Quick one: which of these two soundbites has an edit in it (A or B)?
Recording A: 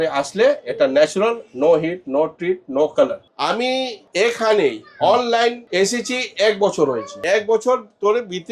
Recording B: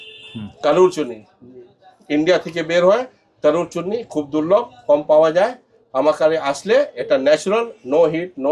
A